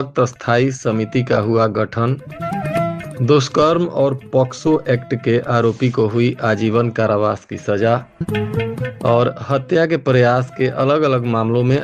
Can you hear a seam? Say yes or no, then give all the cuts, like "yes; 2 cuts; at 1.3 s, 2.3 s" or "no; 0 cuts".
no; 0 cuts